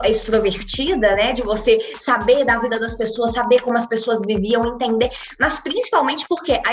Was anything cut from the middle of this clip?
no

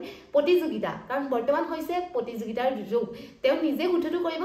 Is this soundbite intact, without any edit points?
yes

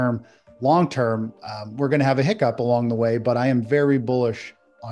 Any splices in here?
no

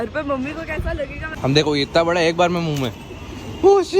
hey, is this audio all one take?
no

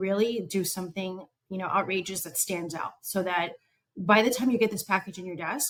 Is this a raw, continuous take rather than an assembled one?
yes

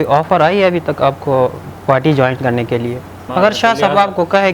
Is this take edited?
yes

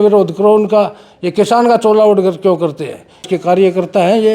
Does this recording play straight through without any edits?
no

